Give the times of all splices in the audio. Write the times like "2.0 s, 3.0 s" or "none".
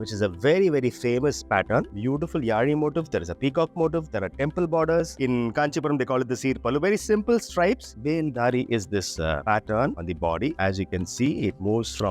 1.9 s, 5.2 s, 7.9 s